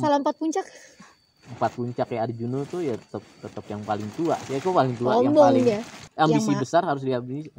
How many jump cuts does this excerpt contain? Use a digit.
1